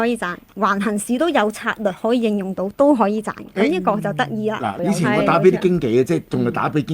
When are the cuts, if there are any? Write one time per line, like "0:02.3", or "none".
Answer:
0:04.7